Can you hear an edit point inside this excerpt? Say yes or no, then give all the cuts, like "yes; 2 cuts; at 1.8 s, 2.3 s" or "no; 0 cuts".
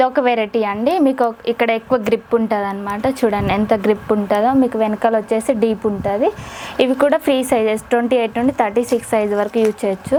no; 0 cuts